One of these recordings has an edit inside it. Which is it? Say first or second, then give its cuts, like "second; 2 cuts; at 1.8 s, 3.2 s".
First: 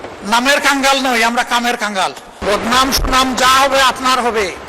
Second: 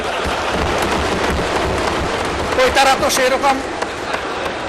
first; 1 cut; at 2.4 s